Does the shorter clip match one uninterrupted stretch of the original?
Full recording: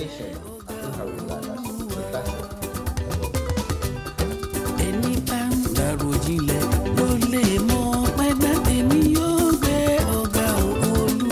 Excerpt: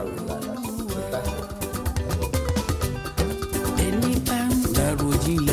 yes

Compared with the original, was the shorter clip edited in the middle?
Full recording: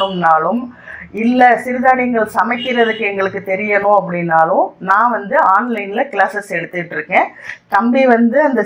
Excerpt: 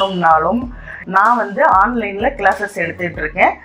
yes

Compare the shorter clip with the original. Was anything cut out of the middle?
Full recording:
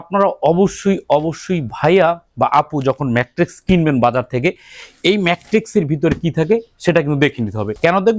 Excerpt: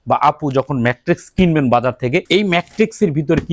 yes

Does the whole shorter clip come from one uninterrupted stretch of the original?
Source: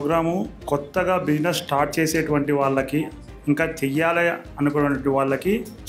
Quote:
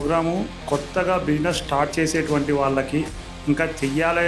yes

